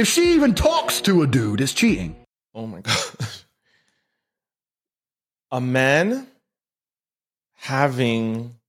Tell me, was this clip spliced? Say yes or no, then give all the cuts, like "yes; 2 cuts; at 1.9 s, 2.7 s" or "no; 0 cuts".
no; 0 cuts